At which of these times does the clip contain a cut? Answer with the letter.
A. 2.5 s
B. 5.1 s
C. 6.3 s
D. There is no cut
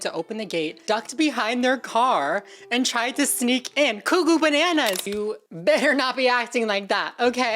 B